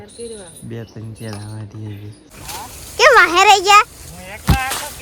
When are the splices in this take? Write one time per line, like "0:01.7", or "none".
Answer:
0:02.2